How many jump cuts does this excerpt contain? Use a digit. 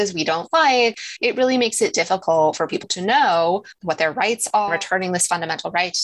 2